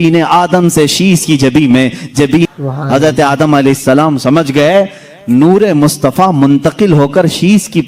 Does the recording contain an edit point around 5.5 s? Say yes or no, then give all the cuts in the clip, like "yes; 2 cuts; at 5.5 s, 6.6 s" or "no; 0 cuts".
no; 1 cut; at 2.5 s